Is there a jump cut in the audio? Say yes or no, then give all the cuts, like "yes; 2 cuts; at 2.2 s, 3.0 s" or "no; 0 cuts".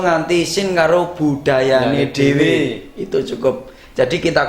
no; 0 cuts